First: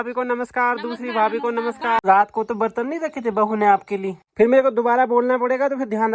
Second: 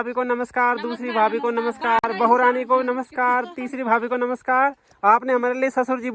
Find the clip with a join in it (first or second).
first